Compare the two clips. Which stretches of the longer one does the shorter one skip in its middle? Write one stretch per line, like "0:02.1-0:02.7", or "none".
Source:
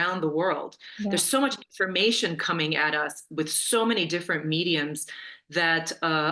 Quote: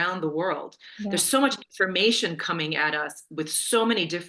none